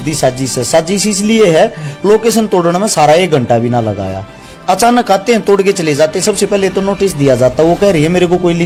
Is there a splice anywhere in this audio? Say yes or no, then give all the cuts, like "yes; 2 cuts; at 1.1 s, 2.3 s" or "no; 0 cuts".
no; 0 cuts